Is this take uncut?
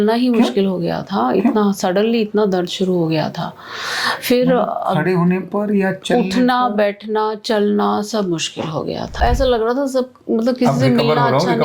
no; 1 cut; at 9.2 s

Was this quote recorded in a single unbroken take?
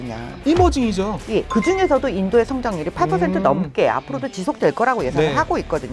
no; 1 cut; at 1.5 s

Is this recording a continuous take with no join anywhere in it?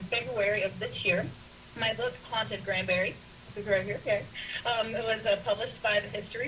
yes; 0 cuts

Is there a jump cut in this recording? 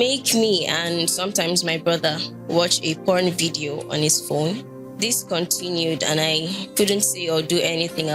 no; 0 cuts

